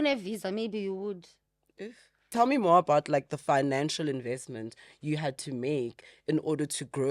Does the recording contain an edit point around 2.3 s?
yes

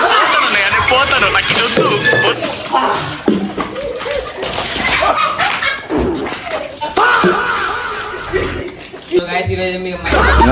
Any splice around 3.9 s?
no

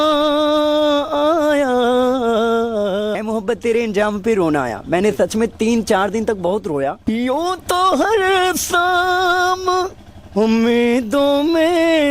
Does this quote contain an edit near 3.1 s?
yes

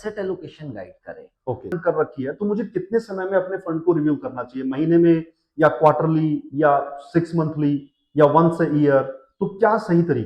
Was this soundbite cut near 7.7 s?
no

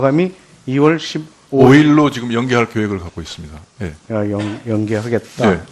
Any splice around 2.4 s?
yes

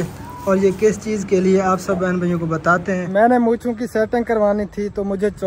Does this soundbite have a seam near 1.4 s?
no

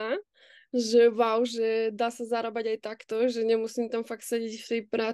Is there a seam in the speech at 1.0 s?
no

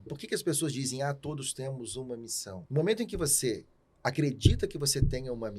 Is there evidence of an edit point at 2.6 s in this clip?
yes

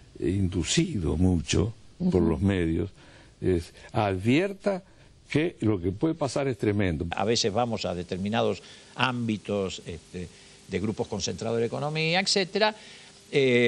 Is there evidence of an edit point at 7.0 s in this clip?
yes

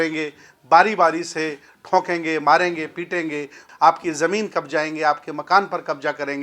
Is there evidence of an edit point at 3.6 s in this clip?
yes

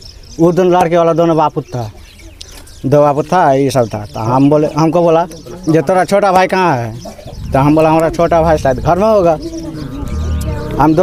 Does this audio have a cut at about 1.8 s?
no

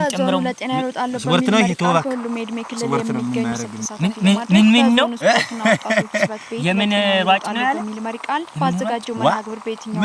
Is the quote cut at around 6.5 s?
no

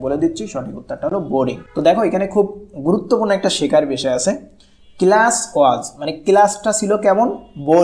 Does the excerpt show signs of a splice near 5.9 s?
no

